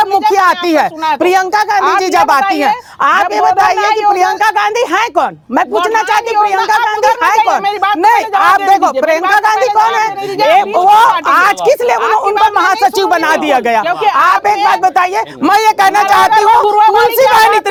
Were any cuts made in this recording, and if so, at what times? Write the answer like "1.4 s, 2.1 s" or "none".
none